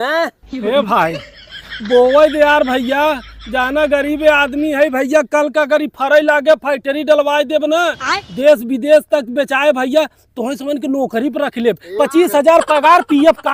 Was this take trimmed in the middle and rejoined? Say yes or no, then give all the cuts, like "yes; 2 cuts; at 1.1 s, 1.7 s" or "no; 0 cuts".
no; 0 cuts